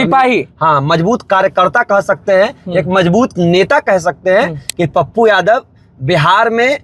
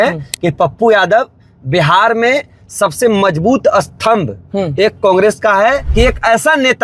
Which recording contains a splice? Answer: second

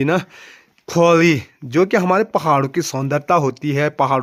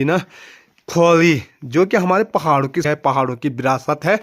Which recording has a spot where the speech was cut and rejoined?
second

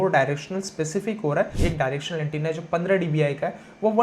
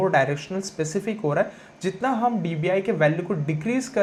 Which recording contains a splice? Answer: first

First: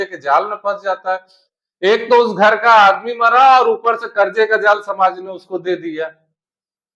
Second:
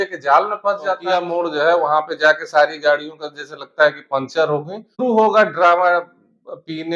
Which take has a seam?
second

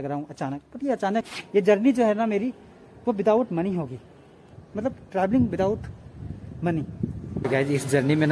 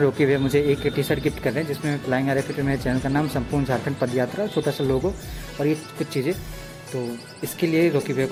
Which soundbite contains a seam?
first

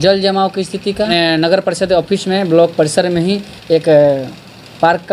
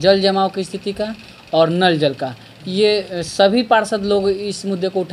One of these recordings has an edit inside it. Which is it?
first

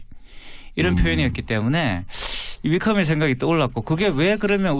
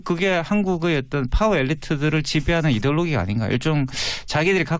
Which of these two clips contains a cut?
first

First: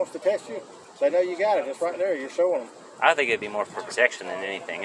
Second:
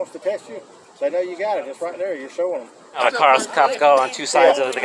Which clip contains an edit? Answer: second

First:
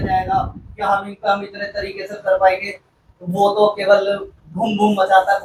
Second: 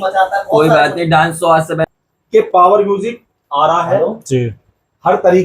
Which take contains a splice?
second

